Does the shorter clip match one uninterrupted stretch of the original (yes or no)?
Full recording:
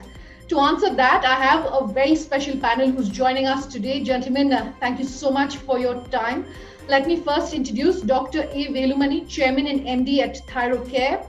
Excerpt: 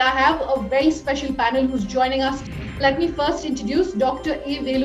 no